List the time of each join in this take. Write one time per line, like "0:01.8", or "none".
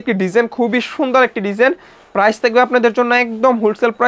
none

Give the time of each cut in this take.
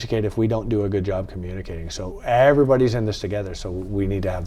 0:02.1

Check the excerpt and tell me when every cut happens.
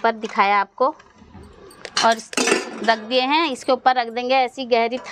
none

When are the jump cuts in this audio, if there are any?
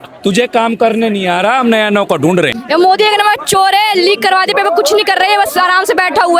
0:02.6

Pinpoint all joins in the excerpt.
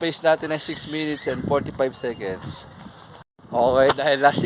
0:03.1

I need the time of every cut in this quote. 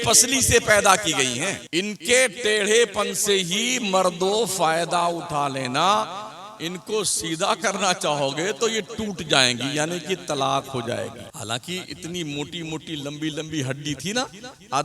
0:01.6
0:11.3

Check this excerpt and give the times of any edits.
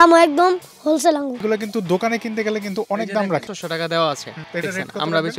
0:01.4
0:03.5
0:04.3

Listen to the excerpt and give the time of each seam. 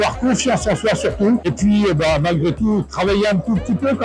none

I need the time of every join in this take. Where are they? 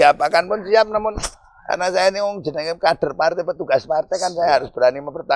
none

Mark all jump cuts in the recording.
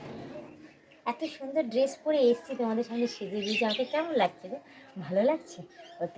none

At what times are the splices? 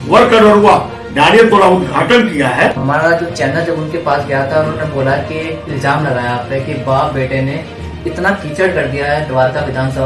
0:02.8

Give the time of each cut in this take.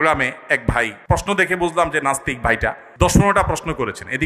0:01.0
0:02.8

